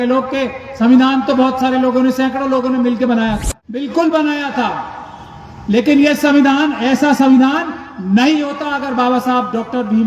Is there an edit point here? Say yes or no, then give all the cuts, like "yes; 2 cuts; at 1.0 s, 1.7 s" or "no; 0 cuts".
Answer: yes; 1 cut; at 3.8 s